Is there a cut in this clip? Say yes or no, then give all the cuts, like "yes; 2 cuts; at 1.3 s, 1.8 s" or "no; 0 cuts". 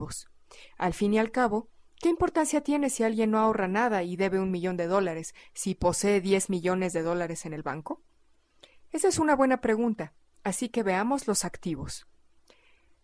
yes; 1 cut; at 4.3 s